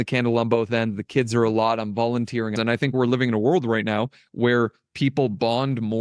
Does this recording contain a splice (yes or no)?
yes